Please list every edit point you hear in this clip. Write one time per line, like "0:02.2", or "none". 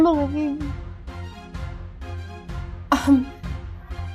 0:01.1
0:02.7